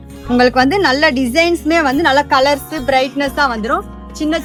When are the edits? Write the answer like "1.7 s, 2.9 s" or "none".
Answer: none